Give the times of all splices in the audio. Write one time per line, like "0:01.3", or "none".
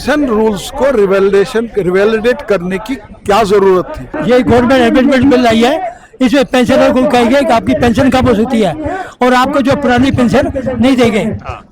0:04.1